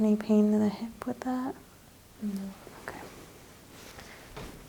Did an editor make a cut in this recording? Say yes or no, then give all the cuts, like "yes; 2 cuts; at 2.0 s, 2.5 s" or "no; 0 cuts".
no; 0 cuts